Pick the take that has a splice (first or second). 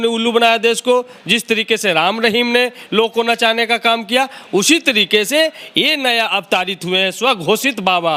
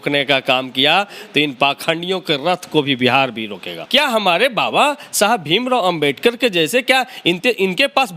second